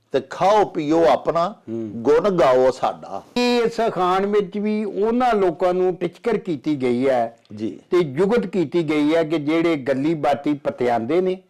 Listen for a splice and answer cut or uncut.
cut